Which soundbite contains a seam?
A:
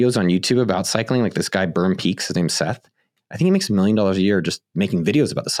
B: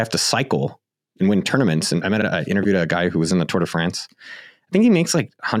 B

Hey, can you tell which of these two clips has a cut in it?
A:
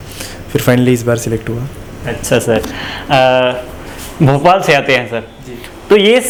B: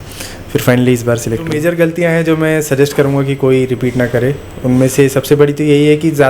B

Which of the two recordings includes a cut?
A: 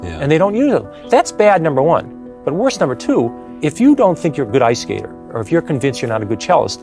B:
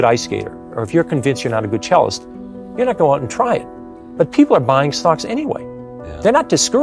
A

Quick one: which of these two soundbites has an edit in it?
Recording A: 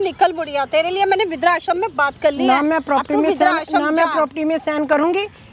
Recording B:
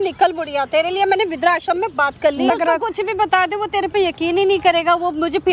B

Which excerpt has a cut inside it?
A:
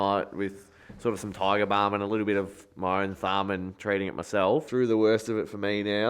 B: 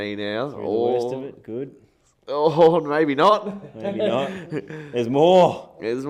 A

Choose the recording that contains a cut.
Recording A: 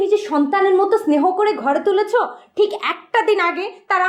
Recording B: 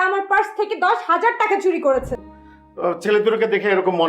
B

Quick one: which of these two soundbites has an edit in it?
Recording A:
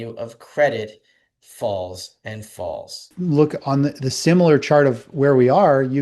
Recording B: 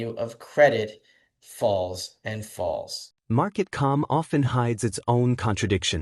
A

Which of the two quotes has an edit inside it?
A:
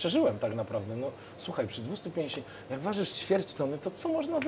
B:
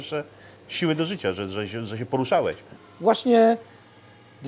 B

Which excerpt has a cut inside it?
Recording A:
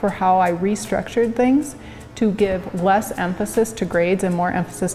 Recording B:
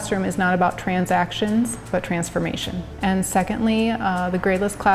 B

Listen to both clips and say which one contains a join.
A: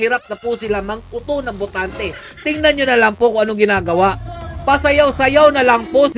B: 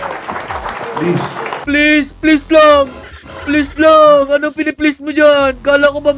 B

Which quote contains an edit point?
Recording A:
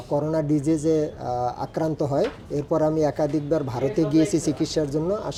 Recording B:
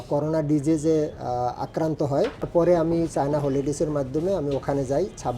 B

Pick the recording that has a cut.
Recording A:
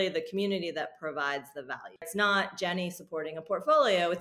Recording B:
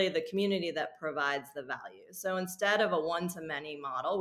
A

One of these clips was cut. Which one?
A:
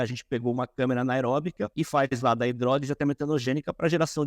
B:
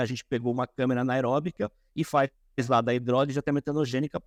A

